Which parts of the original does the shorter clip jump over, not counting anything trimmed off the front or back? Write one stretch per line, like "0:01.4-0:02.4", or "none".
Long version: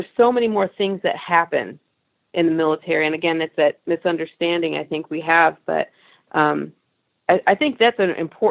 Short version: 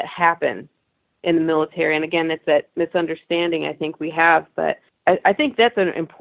0:06.0-0:07.1

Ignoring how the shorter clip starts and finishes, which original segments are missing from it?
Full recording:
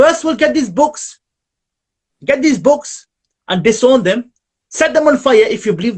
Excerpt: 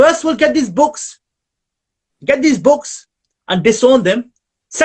none

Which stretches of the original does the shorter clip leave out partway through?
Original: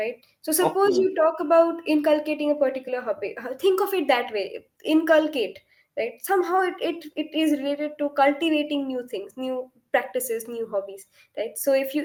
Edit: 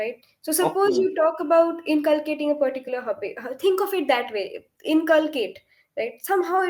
none

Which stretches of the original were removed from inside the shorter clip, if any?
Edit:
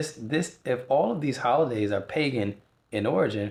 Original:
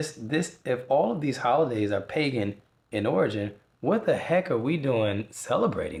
none

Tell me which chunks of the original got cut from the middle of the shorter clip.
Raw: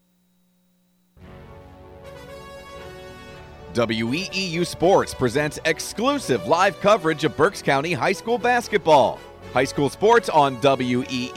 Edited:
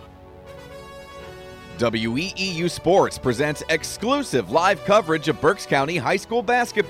0:03.3-0:03.7

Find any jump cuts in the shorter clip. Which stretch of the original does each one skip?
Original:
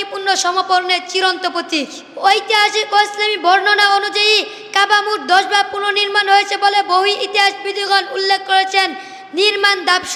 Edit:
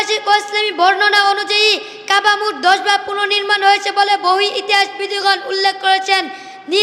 none

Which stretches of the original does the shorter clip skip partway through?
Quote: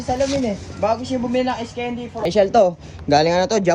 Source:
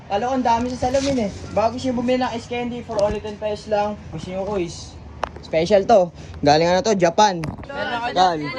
0:03.0-0:05.6

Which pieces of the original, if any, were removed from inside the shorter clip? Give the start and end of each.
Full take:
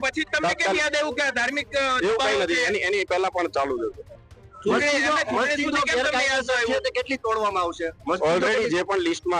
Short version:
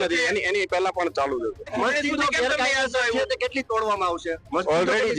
0:04.1-0:05.2

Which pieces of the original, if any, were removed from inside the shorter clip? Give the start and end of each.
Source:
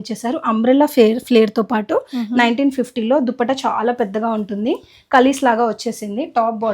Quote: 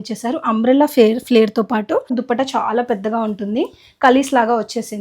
0:02.1-0:03.2

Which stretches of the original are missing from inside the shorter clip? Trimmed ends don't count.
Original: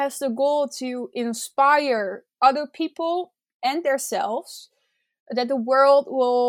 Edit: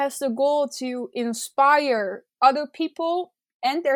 none

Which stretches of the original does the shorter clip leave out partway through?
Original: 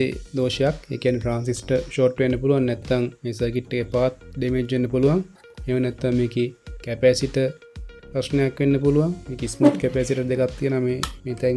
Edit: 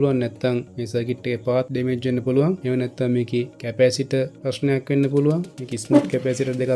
0:04.2-0:04.4
0:05.3-0:05.6
0:06.6-0:06.8
0:07.6-0:08.1

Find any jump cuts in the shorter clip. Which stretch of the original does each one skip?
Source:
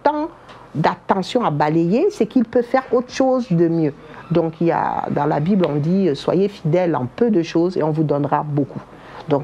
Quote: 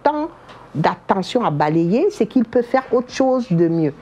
none

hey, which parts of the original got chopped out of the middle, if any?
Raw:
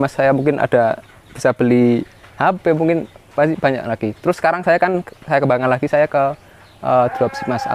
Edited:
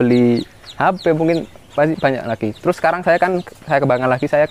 none

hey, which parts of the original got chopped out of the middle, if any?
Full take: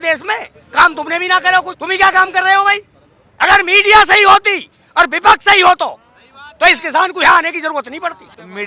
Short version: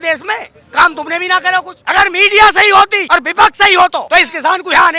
0:01.7-0:03.3
0:04.5-0:04.9
0:05.9-0:06.6

